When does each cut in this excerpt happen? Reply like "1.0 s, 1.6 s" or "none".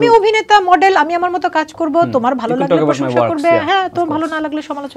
none